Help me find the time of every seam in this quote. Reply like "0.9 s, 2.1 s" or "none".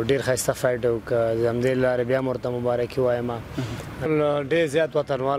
4.1 s